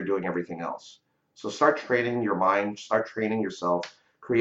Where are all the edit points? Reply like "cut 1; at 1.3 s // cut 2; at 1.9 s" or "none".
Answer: none